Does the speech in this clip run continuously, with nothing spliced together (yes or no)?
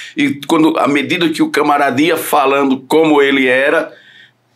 yes